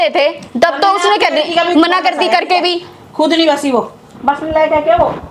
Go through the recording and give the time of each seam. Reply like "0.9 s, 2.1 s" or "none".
none